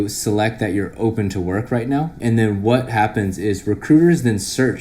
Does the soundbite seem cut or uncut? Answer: cut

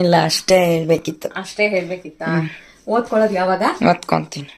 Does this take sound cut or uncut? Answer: uncut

